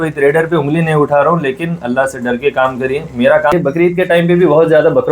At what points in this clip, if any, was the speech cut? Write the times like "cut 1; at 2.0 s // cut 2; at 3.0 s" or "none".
cut 1; at 3.5 s